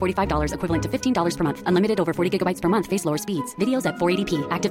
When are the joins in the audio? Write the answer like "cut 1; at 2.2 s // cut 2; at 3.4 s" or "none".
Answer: none